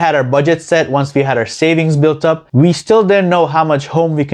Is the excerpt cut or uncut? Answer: cut